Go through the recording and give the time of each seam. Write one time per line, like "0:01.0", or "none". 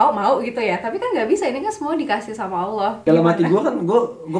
0:03.0